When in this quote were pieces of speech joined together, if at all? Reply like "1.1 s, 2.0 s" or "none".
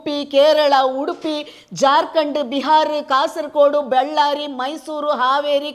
none